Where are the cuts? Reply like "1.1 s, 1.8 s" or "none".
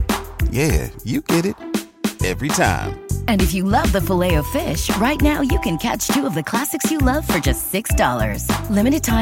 none